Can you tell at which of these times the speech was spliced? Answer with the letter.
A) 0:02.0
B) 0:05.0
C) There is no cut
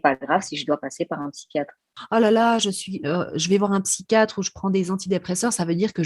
A